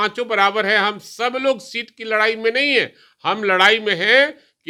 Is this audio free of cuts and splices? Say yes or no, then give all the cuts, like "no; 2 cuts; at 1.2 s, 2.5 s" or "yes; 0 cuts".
yes; 0 cuts